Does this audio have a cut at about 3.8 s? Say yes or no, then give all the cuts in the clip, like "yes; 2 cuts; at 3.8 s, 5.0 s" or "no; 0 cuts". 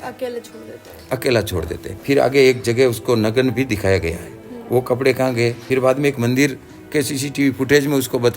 no; 2 cuts; at 1.9 s, 5.6 s